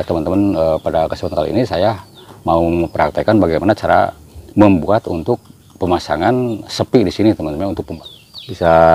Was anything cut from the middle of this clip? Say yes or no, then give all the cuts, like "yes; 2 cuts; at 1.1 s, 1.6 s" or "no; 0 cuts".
yes; 1 cut; at 7.9 s